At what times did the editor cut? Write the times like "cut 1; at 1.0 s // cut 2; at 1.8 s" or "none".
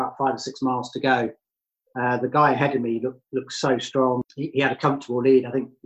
cut 1; at 4.2 s